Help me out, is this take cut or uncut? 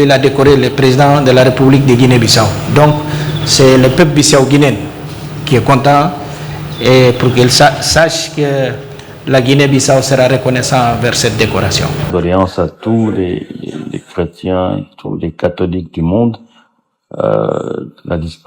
cut